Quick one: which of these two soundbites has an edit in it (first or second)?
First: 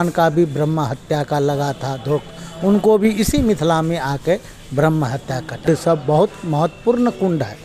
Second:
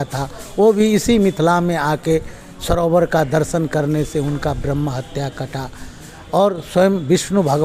first